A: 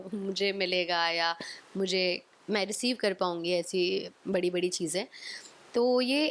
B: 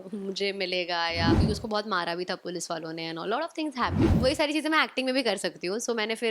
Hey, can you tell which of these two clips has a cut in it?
B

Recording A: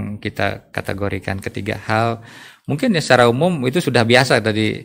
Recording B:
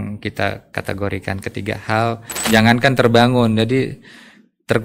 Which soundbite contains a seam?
B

